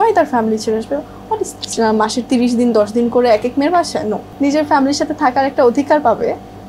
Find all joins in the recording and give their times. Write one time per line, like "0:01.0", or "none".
0:01.6
0:04.3